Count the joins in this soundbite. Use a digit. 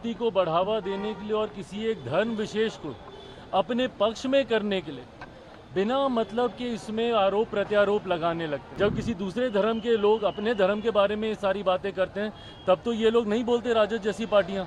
1